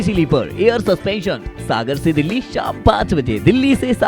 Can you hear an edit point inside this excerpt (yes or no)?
no